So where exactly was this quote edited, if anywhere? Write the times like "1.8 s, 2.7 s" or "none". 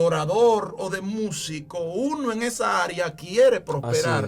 none

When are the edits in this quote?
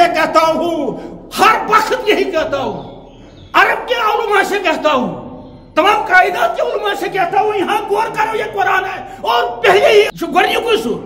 10.1 s

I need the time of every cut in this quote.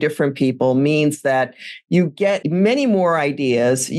2.4 s

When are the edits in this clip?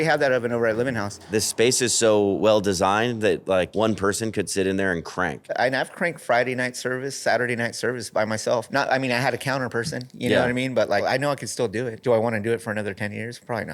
1.2 s, 3.7 s, 5.5 s, 8.7 s, 11.4 s

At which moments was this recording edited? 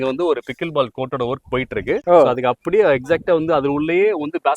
none

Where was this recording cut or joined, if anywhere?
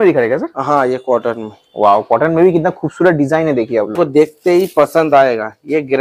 4.0 s

